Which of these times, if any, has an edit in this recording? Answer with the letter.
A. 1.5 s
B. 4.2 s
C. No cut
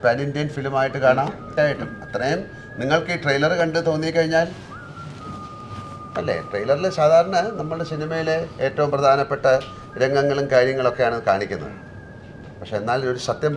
A